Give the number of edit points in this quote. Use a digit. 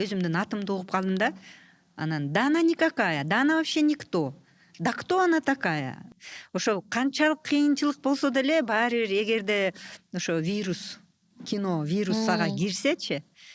1